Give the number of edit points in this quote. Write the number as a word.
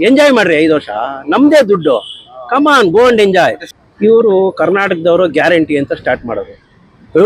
one